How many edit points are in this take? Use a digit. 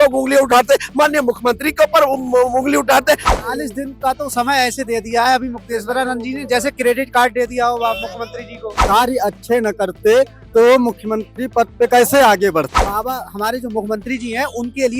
3